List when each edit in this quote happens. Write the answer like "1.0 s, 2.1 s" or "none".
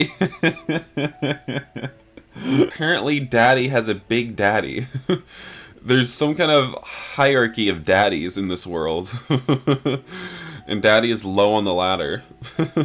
2.8 s